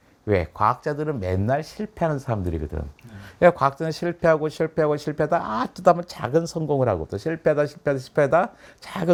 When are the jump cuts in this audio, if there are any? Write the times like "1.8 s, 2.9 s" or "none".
none